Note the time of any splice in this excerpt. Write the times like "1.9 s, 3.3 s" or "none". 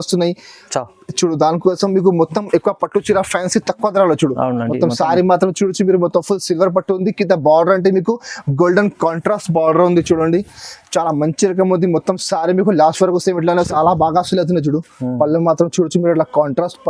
13.7 s